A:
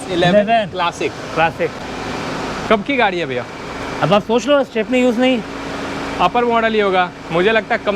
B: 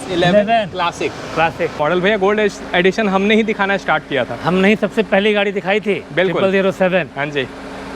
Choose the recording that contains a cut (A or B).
B